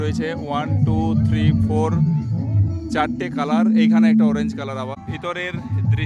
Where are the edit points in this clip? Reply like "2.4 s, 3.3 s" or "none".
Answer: 5.0 s